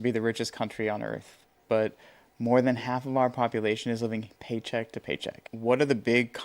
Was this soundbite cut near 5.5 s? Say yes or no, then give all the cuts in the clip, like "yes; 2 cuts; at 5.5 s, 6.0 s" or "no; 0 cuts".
yes; 1 cut; at 5.5 s